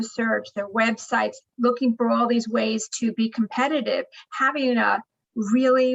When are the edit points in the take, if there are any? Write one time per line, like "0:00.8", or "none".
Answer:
none